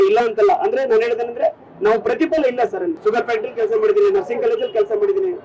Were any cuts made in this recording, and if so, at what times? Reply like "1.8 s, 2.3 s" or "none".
2.9 s